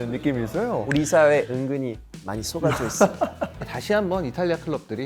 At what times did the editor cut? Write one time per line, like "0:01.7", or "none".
0:03.8